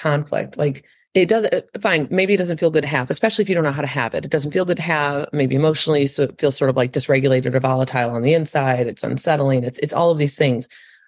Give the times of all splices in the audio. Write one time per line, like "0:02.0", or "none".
0:00.9